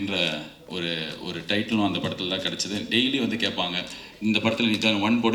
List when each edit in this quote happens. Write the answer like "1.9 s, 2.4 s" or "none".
none